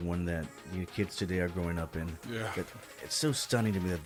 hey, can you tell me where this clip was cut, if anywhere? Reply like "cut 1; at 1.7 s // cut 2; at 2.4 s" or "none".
none